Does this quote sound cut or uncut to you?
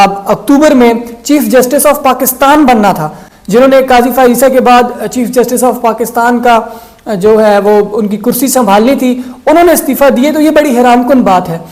uncut